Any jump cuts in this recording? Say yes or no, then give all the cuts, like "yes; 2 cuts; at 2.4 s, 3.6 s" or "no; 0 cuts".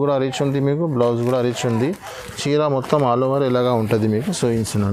no; 0 cuts